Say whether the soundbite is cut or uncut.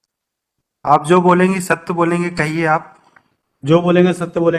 uncut